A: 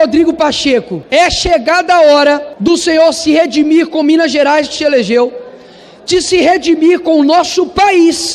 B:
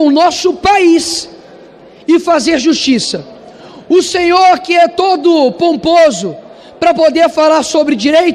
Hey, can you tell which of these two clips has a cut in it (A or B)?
A